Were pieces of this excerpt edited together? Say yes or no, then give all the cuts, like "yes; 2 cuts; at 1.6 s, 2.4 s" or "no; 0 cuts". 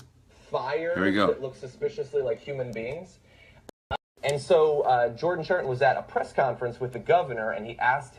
yes; 1 cut; at 5.6 s